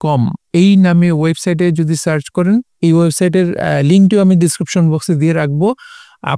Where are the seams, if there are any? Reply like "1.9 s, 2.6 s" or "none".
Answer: none